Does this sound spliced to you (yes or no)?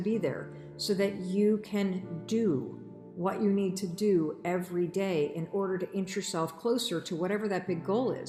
no